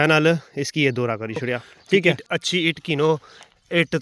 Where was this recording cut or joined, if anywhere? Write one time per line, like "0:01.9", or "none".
0:02.2